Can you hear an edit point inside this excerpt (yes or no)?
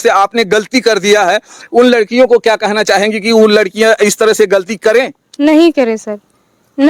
no